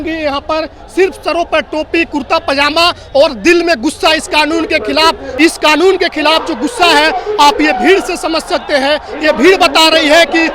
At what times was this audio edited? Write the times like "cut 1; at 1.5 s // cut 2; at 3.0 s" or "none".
cut 1; at 5.4 s